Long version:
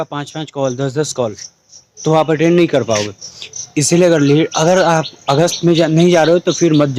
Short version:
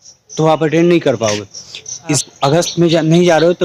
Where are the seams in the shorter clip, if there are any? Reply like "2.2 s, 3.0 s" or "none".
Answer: 2.2 s